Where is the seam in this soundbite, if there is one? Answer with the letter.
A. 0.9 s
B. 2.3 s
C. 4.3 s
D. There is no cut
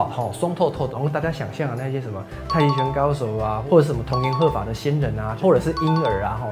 A